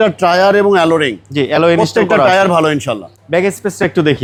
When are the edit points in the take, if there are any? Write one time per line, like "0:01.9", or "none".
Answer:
none